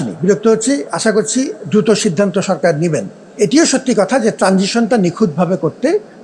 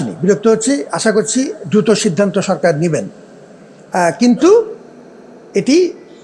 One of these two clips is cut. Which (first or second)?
first